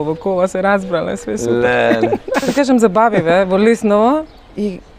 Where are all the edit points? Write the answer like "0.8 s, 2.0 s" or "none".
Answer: 2.5 s